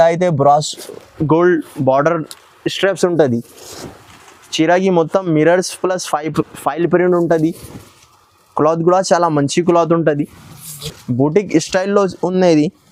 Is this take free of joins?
yes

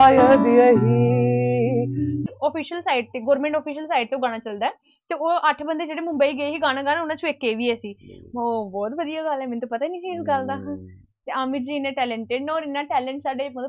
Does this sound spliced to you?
yes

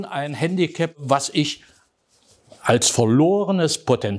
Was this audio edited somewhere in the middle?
yes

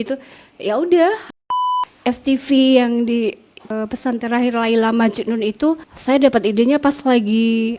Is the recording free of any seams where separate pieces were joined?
no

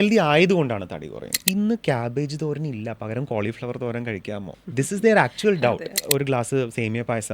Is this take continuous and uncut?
no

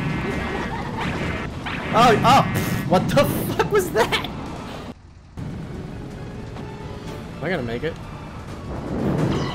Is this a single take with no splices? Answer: no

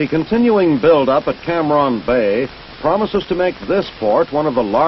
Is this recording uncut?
no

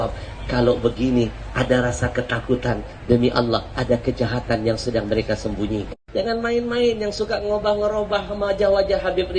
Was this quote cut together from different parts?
yes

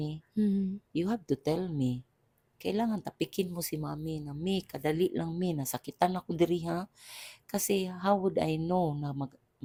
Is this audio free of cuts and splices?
yes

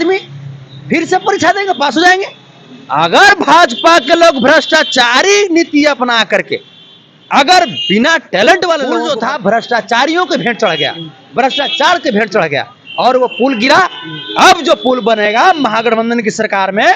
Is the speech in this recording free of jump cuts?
no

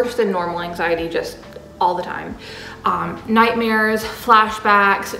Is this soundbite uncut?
yes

